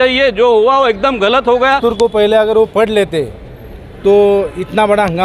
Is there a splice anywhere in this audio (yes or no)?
yes